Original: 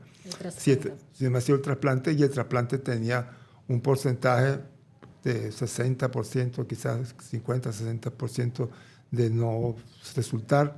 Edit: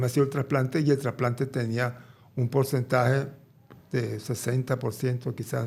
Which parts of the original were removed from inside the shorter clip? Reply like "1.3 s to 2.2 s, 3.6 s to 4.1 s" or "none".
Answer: none